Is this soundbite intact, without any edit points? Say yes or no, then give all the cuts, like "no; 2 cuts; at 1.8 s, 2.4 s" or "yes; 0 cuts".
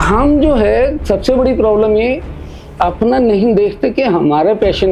yes; 0 cuts